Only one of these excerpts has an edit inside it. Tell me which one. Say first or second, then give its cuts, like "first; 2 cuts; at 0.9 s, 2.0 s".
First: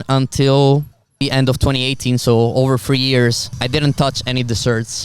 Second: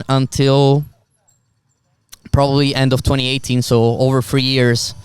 first; 2 cuts; at 1.2 s, 3.5 s